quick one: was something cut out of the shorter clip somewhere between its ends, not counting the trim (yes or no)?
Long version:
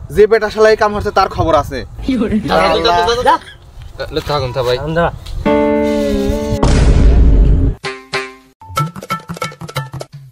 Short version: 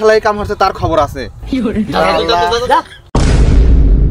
yes